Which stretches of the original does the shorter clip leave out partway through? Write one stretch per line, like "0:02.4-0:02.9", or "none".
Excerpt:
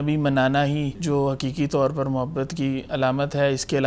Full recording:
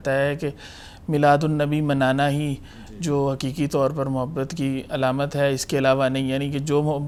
0:02.6-0:02.9